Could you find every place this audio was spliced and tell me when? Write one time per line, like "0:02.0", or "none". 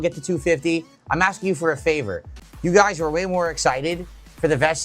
0:02.3